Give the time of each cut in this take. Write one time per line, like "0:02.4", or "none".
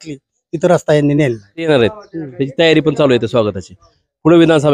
0:01.7

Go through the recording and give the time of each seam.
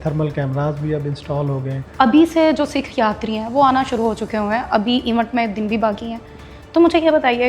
0:01.9

